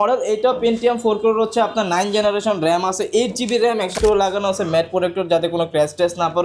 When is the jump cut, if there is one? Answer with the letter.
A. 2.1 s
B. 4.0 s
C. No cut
B